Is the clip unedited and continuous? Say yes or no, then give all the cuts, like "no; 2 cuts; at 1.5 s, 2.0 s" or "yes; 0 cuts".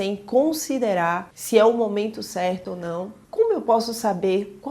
no; 1 cut; at 3.2 s